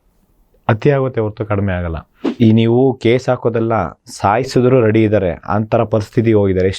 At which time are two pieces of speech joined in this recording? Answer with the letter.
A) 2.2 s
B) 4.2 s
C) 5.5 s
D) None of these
A